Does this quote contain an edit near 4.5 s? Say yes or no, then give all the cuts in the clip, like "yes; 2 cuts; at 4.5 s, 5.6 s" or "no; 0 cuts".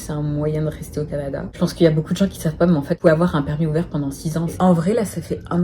yes; 1 cut; at 4.5 s